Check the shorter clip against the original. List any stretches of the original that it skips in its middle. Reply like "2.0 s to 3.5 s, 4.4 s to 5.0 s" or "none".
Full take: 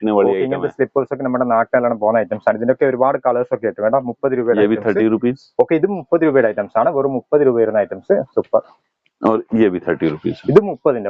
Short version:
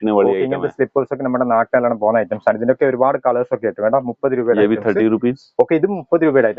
none